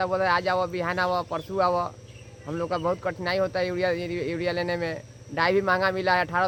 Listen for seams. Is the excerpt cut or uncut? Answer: uncut